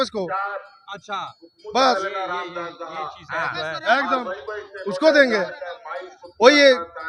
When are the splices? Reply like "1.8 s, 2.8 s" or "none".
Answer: none